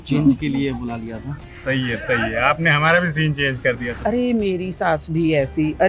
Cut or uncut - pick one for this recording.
cut